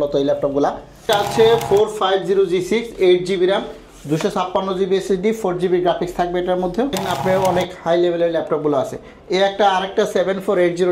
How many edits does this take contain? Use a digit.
2